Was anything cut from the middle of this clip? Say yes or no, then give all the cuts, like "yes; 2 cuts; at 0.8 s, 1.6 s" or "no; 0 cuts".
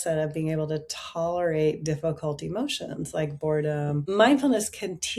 yes; 1 cut; at 4.1 s